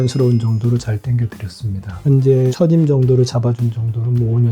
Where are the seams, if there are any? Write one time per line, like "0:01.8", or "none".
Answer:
0:02.0